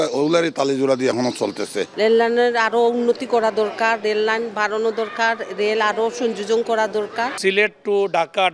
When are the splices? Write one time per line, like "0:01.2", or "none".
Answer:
none